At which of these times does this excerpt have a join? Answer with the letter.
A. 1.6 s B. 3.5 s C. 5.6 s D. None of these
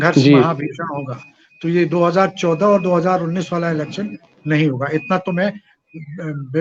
D